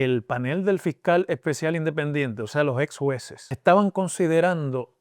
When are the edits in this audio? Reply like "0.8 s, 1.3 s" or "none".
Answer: 3.5 s